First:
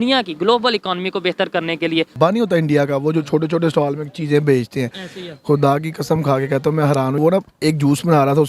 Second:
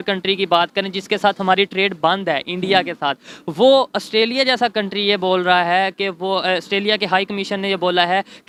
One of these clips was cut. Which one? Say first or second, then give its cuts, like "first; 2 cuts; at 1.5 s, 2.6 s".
first; 2 cuts; at 2.1 s, 7.2 s